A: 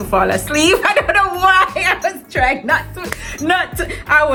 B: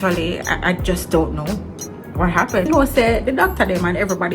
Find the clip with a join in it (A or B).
B